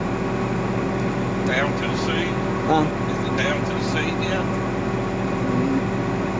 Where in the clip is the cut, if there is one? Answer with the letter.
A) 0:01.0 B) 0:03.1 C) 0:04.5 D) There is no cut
D